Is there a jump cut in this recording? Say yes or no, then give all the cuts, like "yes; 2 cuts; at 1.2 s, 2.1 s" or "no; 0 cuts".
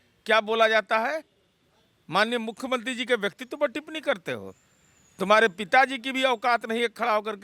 no; 0 cuts